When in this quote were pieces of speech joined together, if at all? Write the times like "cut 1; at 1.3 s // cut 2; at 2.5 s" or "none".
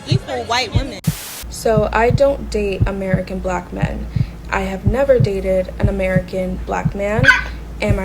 cut 1; at 1.2 s